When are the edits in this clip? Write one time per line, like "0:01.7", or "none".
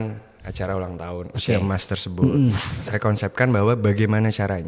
0:02.7